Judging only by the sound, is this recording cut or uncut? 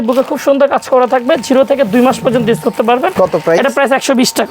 uncut